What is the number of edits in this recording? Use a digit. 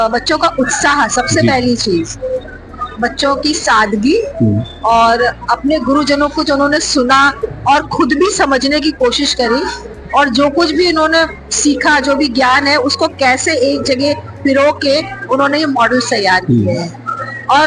0